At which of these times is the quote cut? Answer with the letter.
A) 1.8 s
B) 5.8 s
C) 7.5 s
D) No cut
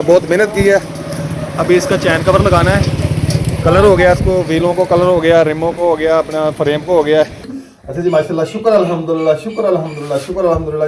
C